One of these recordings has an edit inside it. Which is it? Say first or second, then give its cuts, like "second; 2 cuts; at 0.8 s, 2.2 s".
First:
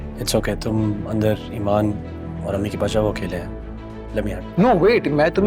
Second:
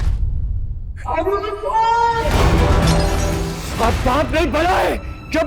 second; 1 cut; at 3.3 s